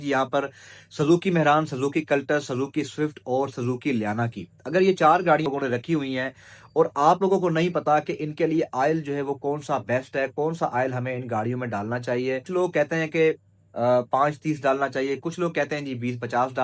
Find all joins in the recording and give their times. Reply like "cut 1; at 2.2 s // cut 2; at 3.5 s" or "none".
cut 1; at 5.5 s // cut 2; at 12.5 s

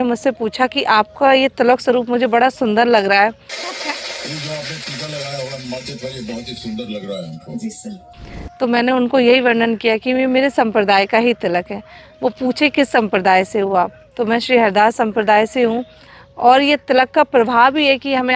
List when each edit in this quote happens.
none

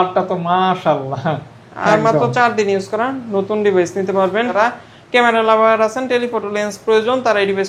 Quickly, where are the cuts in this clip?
cut 1; at 4.5 s

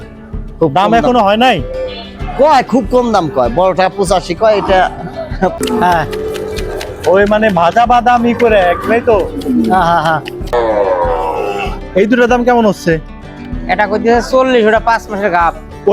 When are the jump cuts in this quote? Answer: cut 1; at 5.5 s // cut 2; at 10.5 s

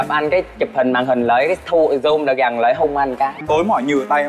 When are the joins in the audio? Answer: cut 1; at 3.4 s

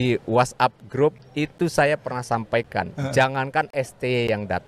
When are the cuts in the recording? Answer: cut 1; at 1.1 s

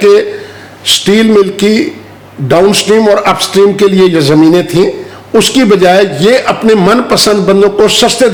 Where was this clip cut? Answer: none

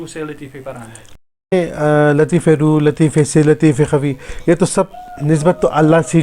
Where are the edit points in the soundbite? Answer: cut 1; at 1.5 s

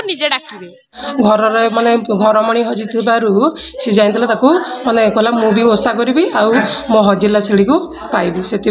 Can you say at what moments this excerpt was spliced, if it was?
cut 1; at 1.0 s

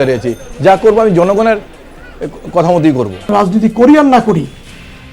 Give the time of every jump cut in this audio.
cut 1; at 3.3 s

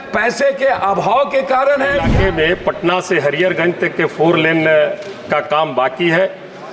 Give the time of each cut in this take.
cut 1; at 2.1 s

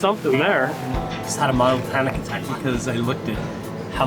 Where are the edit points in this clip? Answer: cut 1; at 1.0 s

